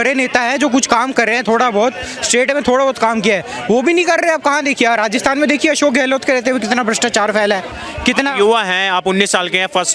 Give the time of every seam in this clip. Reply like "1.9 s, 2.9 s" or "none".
none